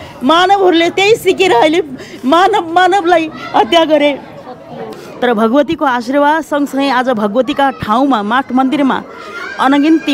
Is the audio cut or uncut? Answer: cut